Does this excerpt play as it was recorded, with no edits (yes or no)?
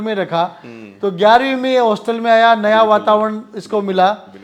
yes